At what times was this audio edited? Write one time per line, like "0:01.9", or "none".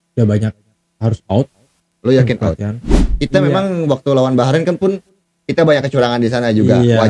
0:03.1